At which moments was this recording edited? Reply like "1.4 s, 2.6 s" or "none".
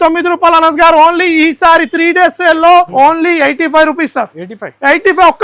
2.9 s